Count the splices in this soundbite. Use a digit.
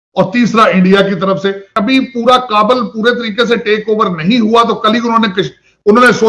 1